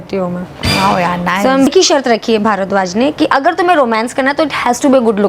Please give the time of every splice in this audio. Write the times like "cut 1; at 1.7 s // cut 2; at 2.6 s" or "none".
cut 1; at 1.7 s